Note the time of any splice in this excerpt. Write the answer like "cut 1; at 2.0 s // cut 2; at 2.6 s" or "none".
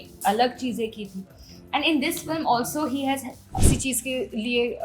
cut 1; at 3.7 s